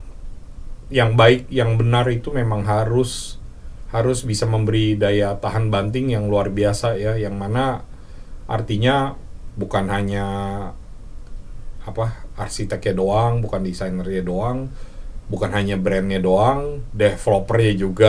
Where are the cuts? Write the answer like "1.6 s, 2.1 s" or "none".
none